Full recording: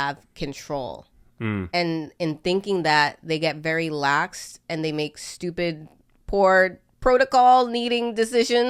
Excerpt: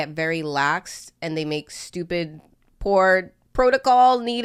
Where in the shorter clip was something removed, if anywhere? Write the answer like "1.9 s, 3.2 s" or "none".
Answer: none